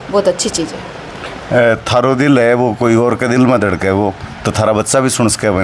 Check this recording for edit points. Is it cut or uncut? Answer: uncut